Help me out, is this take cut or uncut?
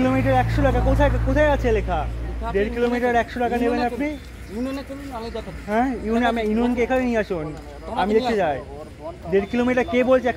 uncut